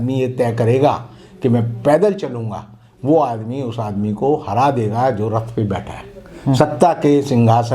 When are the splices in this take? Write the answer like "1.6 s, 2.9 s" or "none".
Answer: none

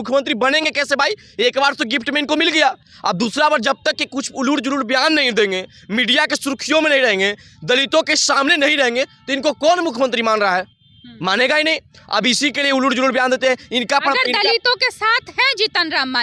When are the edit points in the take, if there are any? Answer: none

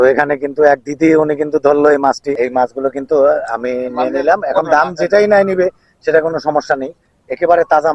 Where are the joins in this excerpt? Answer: 2.4 s

